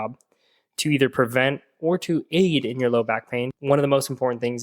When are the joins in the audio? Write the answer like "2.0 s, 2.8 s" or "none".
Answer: 3.6 s